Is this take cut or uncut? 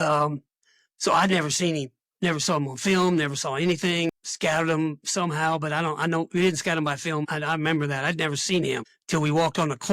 cut